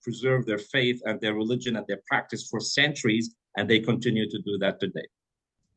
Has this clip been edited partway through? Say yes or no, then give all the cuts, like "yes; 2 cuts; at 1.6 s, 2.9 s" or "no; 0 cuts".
no; 0 cuts